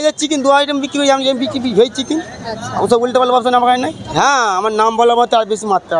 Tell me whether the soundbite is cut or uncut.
cut